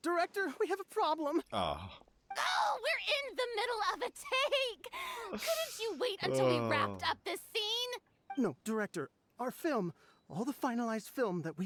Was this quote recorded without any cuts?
yes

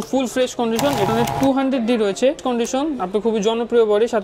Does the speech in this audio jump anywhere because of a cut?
yes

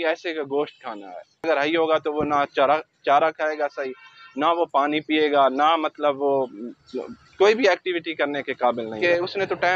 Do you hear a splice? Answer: yes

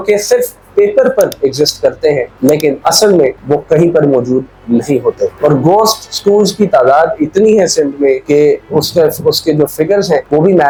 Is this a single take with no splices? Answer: yes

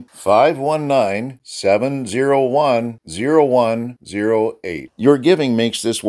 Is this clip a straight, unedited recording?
yes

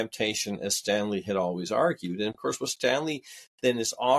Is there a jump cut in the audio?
no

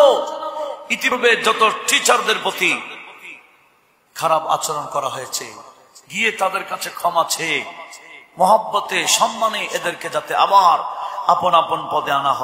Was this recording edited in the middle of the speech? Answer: yes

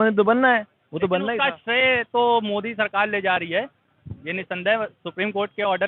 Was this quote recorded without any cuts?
yes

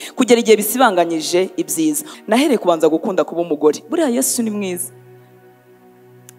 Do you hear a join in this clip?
yes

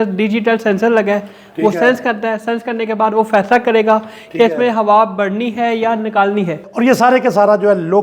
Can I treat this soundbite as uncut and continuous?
no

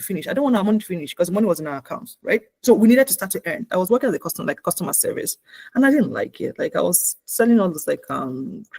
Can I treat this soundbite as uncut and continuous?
no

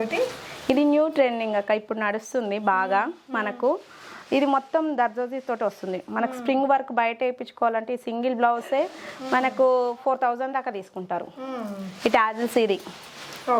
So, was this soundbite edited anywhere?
no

